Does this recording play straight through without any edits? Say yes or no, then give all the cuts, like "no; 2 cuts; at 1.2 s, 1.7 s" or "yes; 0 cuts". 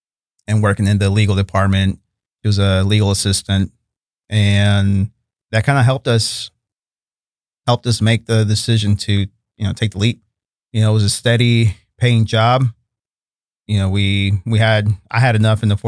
yes; 0 cuts